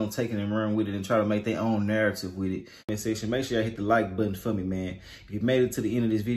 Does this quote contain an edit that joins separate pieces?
yes; 1 cut; at 2.9 s

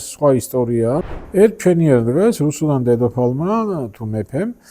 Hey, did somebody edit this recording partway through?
yes; 1 cut; at 1.1 s

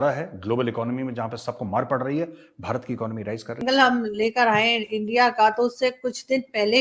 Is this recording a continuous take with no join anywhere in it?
no; 1 cut; at 3.6 s

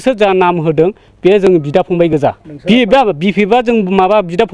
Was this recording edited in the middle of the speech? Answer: yes; 1 cut; at 2.5 s

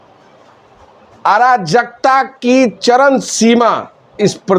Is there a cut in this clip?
no; 0 cuts

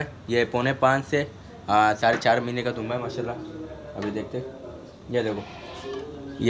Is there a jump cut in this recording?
no; 0 cuts

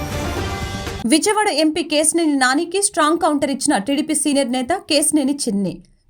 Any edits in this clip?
no; 0 cuts

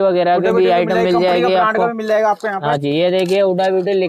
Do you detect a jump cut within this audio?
no; 0 cuts

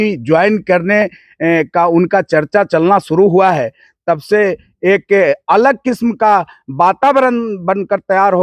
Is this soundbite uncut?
yes; 0 cuts

